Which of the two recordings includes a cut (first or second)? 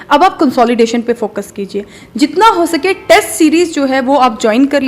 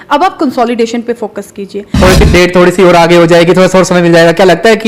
second